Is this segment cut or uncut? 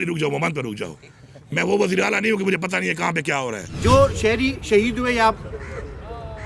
cut